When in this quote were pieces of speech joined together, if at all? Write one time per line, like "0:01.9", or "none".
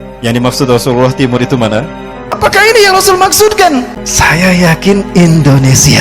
0:02.4
0:03.6